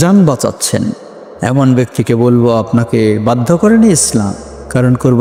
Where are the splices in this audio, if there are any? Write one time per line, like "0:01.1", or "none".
none